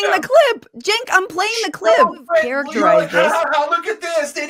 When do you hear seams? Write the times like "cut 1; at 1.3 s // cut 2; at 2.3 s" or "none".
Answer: cut 1; at 2.5 s